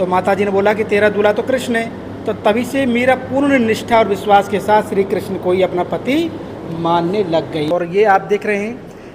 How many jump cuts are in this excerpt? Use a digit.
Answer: 1